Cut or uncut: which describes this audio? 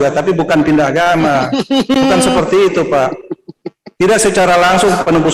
uncut